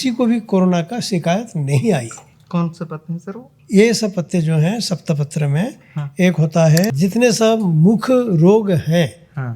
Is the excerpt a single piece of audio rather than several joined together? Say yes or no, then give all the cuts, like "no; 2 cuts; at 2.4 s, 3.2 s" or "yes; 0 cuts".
no; 1 cut; at 6.9 s